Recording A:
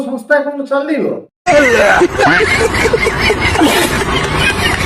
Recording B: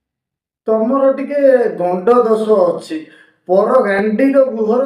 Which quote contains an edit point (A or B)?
A